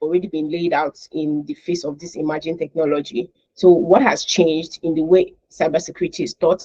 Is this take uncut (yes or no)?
yes